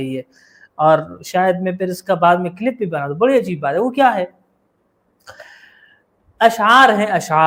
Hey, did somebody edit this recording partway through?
no; 0 cuts

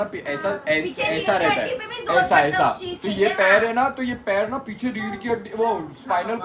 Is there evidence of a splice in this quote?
no; 0 cuts

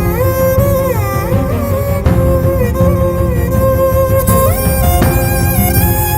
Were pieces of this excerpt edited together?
no; 0 cuts

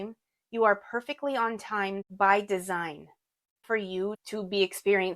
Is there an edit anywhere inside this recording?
yes; 2 cuts; at 2.1 s, 3.6 s

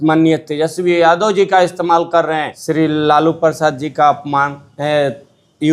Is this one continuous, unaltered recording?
no; 1 cut; at 2.5 s

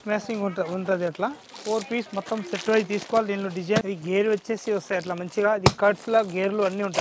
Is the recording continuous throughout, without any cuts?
no; 1 cut; at 3.9 s

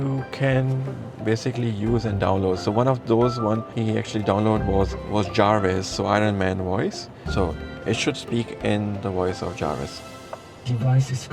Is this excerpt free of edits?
no; 3 cuts; at 3.7 s, 5.0 s, 7.1 s

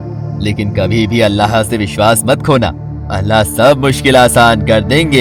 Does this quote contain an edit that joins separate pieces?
no; 0 cuts

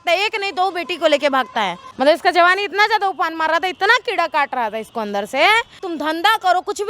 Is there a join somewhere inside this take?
yes; 2 cuts; at 1.8 s, 5.8 s

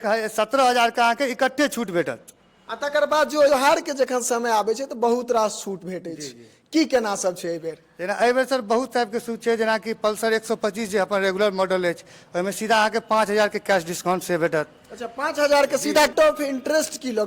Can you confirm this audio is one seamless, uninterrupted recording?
no; 2 cuts; at 3.5 s, 16.1 s

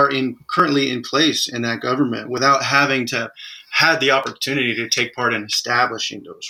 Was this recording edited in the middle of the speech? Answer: no; 0 cuts

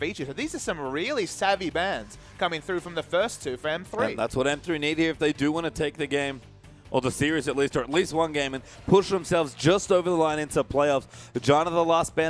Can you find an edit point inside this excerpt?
yes; 1 cut; at 5.6 s

